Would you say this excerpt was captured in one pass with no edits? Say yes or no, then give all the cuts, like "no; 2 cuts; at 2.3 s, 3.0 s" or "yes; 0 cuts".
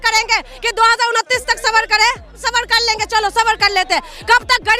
no; 1 cut; at 2.3 s